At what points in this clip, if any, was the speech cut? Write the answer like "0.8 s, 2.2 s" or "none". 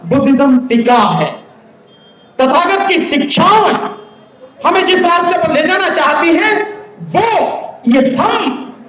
none